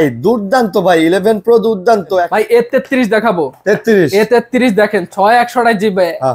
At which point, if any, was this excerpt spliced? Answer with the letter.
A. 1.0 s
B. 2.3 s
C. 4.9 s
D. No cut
B